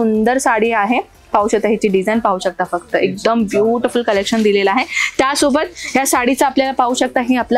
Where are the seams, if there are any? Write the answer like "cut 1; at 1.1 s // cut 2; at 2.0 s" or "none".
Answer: none